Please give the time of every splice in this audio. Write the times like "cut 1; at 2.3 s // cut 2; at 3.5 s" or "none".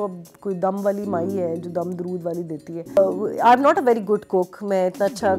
cut 1; at 3.0 s